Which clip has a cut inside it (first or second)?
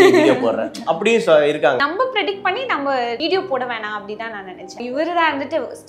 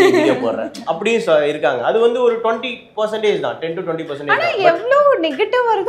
first